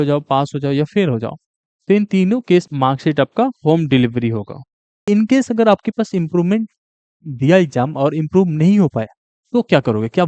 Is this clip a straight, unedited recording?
no; 1 cut; at 5.1 s

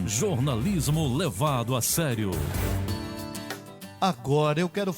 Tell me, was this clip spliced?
yes; 1 cut; at 2.8 s

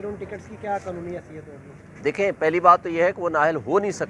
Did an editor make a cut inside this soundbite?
no; 0 cuts

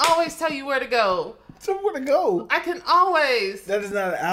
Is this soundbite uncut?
yes; 0 cuts

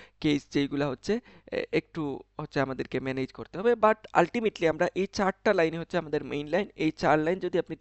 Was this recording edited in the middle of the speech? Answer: no; 0 cuts

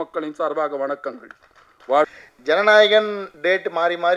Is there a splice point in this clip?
yes; 1 cut; at 2.3 s

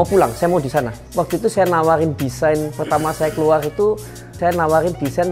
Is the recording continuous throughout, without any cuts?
no; 2 cuts; at 1.0 s, 4.4 s

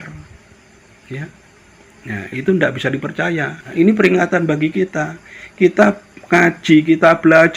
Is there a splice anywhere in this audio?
yes; 1 cut; at 3.6 s

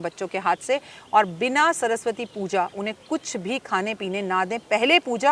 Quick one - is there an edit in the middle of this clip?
no; 0 cuts

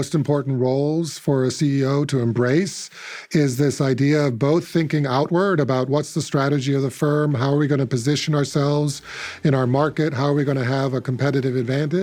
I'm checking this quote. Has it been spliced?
no; 0 cuts

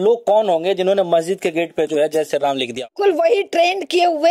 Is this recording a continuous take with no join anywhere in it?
no; 1 cut; at 2.8 s

